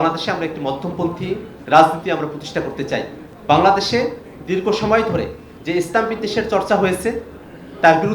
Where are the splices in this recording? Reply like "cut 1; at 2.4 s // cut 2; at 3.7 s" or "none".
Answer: cut 1; at 1.5 s // cut 2; at 3.3 s // cut 3; at 5.5 s